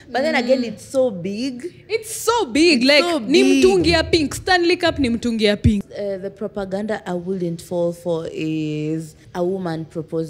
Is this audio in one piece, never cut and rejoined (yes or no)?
no